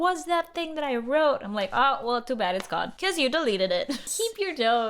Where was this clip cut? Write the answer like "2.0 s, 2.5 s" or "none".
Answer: 2.9 s, 4.1 s